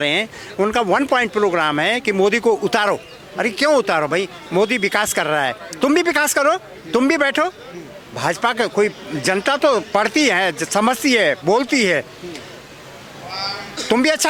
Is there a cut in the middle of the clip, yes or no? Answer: no